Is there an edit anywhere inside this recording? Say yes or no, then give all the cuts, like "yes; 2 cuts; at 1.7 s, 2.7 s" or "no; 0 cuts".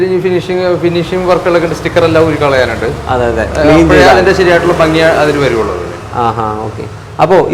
no; 0 cuts